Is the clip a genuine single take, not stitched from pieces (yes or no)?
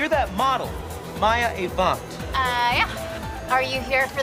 yes